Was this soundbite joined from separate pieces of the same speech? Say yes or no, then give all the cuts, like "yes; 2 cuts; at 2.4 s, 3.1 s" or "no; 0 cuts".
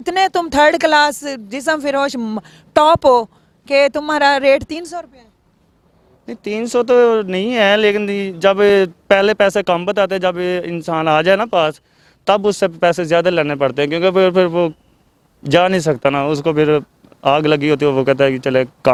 no; 0 cuts